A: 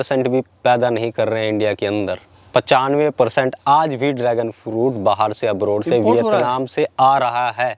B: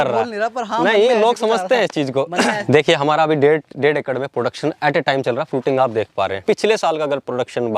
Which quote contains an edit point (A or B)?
B